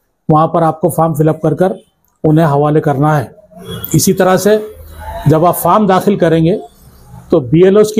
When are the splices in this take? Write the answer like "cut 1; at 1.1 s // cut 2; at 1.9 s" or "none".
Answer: none